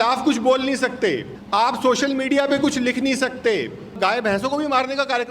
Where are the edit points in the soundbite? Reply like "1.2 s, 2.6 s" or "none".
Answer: 1.3 s, 4.0 s